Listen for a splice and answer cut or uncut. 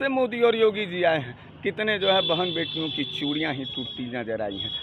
uncut